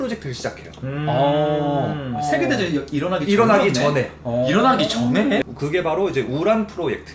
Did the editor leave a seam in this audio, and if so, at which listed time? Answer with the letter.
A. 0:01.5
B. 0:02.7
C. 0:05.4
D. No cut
C